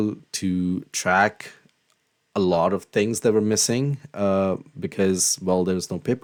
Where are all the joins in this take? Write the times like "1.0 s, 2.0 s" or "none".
none